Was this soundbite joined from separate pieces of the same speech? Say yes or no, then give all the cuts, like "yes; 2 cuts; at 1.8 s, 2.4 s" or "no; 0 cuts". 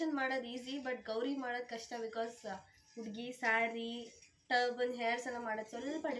no; 0 cuts